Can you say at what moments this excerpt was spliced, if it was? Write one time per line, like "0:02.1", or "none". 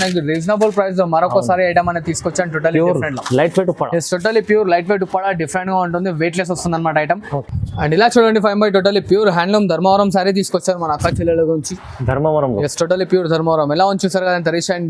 0:07.3

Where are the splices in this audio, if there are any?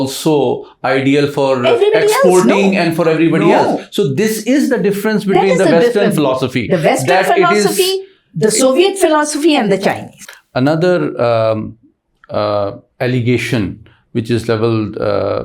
0:10.1

